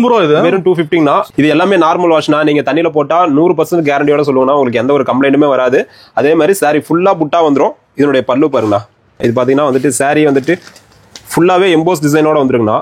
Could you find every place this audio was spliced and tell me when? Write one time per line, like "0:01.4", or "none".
0:01.3
0:09.2